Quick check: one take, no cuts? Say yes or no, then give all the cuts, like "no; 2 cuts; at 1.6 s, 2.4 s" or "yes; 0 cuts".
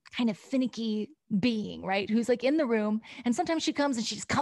no; 1 cut; at 1.2 s